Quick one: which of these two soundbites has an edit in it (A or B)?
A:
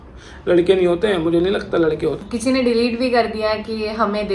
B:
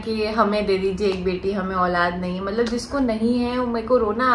A